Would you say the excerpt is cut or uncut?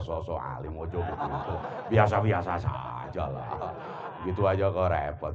uncut